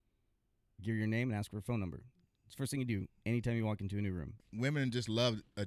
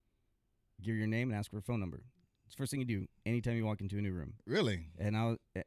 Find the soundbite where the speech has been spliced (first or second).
first